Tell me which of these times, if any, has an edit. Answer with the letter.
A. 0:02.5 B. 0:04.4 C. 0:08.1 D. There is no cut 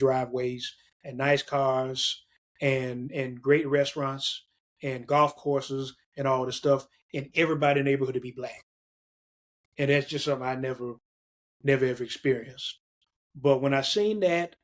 D